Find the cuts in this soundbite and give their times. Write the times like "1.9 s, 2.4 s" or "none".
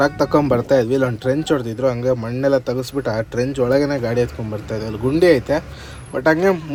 none